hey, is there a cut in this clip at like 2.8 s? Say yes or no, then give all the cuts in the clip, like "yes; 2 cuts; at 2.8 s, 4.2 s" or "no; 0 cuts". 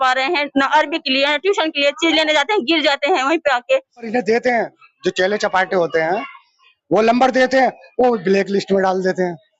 no; 1 cut; at 4.0 s